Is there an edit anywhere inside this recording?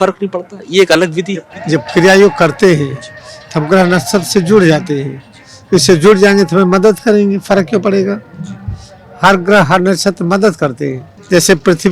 no; 0 cuts

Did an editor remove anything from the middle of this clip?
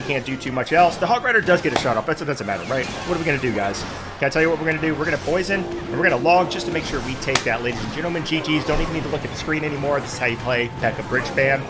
no; 0 cuts

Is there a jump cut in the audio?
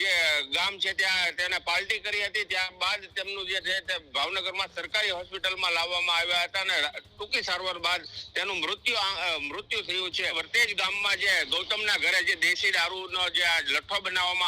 yes; 1 cut; at 10.3 s

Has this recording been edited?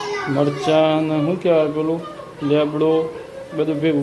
no; 0 cuts

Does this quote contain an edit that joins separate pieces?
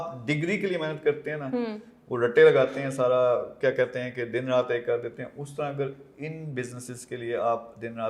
no; 0 cuts

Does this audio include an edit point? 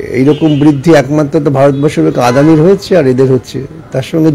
no; 0 cuts

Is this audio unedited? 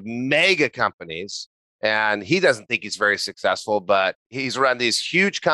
no; 1 cut; at 4.2 s

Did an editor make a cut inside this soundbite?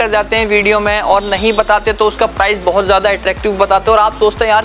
no; 0 cuts

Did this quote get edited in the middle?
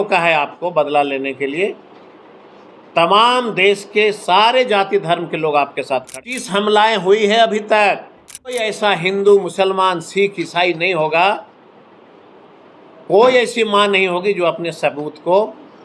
yes; 2 cuts; at 6.1 s, 8.7 s

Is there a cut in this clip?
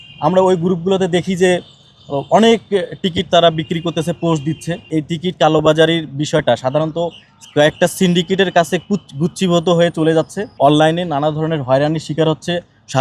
yes; 2 cuts; at 4.9 s, 10.4 s

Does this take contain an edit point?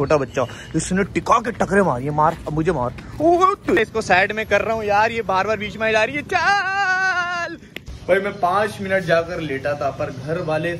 yes; 2 cuts; at 3.8 s, 7.8 s

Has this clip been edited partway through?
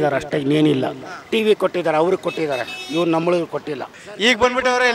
yes; 1 cut; at 4.0 s

